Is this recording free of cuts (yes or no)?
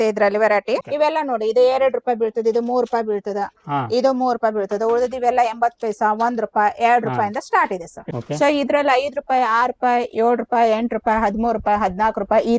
no